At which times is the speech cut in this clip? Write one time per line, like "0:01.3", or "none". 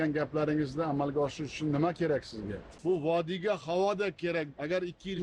0:02.7